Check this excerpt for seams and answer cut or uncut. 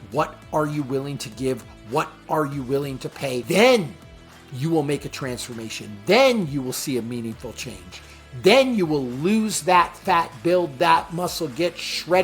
cut